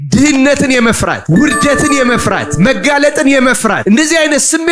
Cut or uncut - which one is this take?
cut